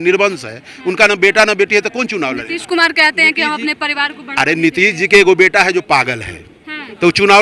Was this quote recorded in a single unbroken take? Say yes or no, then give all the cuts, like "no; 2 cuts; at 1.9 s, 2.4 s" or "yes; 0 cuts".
yes; 0 cuts